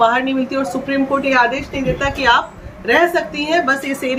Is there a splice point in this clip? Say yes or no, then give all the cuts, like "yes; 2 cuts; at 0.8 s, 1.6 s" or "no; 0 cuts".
no; 0 cuts